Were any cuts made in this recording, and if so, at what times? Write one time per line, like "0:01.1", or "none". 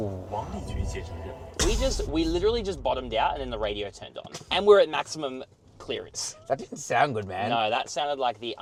none